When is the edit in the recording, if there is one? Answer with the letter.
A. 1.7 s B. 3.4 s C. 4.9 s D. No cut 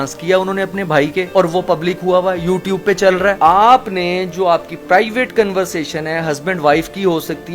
B